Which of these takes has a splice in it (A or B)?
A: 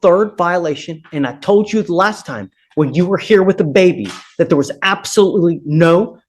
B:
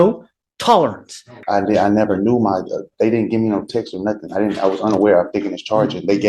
B